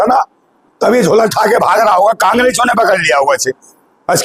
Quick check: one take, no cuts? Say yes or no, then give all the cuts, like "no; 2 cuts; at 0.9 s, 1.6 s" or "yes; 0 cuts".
yes; 0 cuts